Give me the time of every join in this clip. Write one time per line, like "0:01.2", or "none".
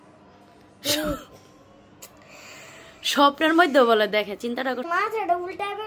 0:04.9